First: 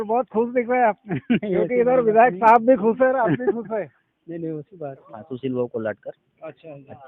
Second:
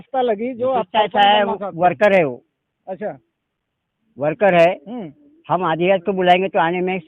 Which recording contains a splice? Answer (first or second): first